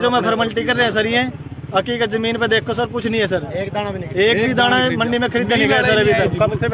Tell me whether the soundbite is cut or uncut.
uncut